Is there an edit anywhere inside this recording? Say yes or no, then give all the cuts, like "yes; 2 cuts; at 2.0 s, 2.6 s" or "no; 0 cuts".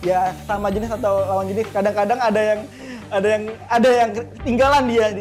no; 0 cuts